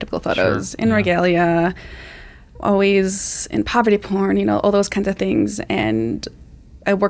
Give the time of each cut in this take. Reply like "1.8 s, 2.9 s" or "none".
none